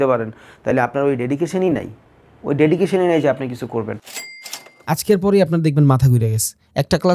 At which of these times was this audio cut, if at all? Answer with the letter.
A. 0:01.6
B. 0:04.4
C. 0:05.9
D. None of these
B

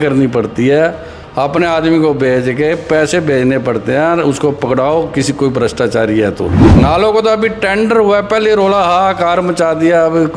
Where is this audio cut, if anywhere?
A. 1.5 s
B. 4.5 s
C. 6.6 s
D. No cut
C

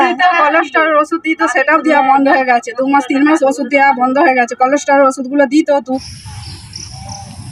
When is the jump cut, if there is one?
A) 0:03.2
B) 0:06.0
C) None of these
B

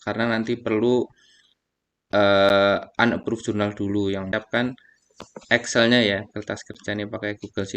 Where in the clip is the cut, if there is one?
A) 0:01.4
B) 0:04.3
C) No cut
B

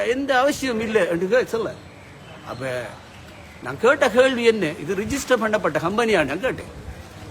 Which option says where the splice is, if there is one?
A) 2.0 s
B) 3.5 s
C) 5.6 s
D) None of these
D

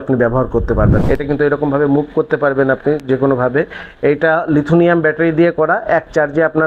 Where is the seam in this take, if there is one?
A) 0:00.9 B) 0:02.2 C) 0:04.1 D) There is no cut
A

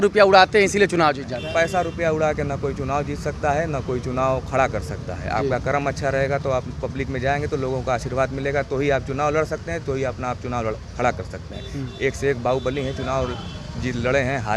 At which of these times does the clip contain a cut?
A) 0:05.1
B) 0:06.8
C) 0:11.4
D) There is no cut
D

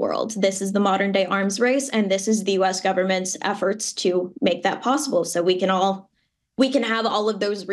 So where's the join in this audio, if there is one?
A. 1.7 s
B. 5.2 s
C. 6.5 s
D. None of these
D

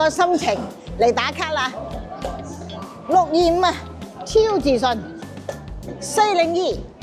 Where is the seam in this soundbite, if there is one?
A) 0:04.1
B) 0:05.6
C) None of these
C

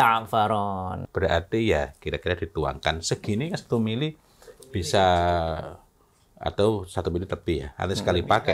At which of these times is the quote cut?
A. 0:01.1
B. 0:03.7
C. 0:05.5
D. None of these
A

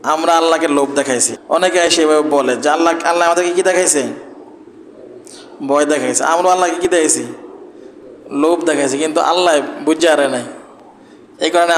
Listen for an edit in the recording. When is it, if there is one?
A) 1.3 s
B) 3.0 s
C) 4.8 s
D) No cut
A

